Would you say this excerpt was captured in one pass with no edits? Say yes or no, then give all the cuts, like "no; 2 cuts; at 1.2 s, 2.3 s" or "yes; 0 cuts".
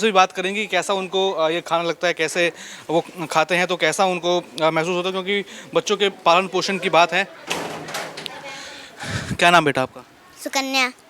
yes; 0 cuts